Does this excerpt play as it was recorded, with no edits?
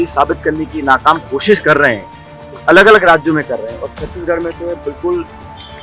yes; 0 cuts

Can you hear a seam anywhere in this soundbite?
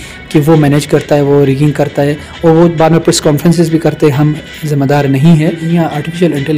yes; 1 cut; at 5.6 s

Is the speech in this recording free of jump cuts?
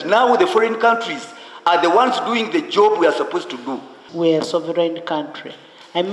no; 1 cut; at 4.0 s

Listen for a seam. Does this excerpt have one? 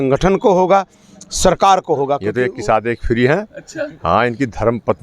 yes; 1 cut; at 2.3 s

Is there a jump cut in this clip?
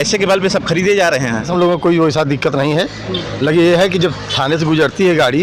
yes; 1 cut; at 1.5 s

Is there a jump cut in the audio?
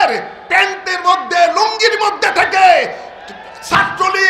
no; 0 cuts

